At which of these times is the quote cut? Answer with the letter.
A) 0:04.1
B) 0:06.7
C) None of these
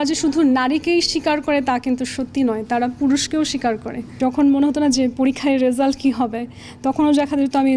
A